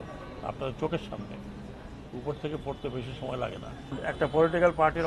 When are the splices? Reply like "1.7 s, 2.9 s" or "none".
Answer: 4.0 s